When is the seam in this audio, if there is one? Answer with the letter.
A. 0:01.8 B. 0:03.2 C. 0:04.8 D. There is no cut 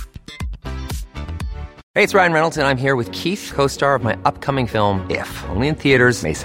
A